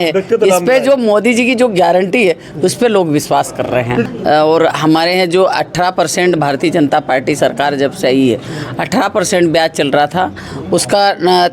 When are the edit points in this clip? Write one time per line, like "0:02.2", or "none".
0:04.0